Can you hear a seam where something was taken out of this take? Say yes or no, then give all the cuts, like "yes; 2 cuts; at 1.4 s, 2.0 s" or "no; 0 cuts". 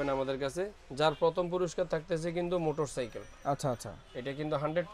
no; 0 cuts